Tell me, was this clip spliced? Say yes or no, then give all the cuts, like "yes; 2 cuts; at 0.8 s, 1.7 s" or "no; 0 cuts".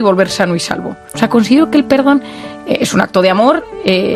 yes; 1 cut; at 1.0 s